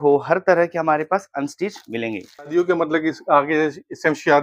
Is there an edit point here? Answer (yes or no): yes